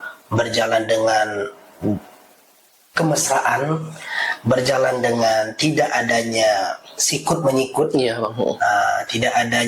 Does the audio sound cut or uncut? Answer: uncut